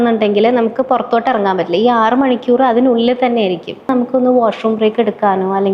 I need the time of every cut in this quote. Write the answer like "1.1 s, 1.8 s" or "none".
3.9 s